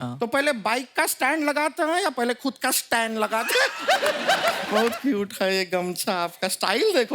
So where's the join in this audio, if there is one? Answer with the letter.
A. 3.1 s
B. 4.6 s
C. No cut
B